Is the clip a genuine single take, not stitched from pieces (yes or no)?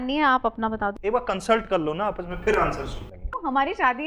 no